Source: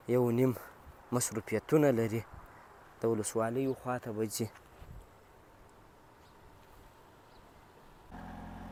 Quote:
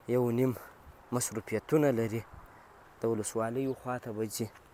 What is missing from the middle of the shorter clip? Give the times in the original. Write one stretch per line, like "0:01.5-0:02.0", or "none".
none